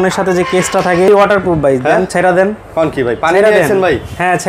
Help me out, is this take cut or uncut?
cut